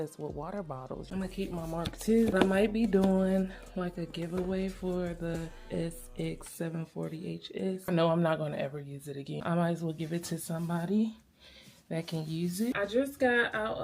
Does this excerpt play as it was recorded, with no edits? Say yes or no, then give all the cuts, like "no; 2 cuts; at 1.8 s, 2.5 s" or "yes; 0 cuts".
no; 5 cuts; at 1.0 s, 2.3 s, 7.9 s, 9.4 s, 12.7 s